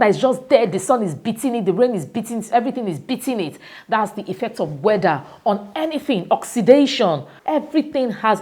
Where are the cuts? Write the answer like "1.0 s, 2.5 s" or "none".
7.3 s

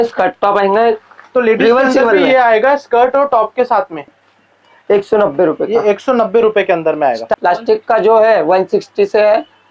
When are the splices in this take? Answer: 4.1 s, 7.3 s

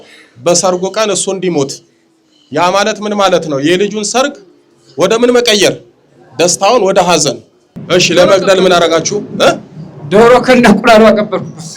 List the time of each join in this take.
7.8 s

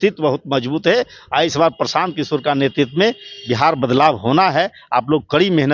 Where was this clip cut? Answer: none

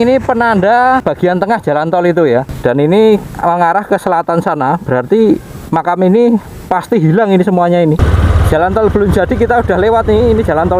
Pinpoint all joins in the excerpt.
1.0 s, 2.5 s, 8.0 s

